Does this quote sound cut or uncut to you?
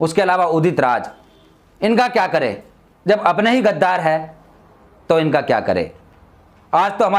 uncut